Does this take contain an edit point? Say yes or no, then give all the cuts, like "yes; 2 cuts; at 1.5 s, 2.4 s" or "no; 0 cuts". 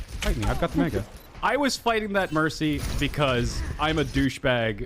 yes; 1 cut; at 1.3 s